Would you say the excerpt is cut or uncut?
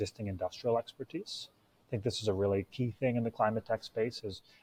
uncut